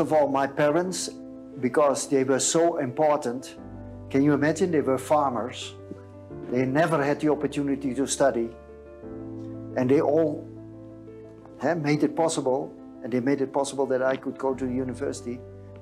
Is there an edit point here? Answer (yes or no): no